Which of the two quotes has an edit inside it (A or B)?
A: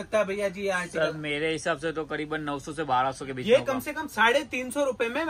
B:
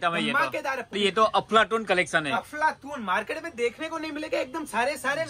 B